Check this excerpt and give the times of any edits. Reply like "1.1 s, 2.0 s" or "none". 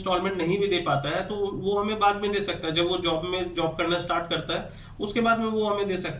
none